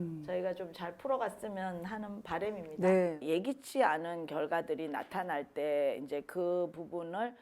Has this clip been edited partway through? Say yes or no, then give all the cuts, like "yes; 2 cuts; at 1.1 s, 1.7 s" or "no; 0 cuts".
yes; 1 cut; at 3.2 s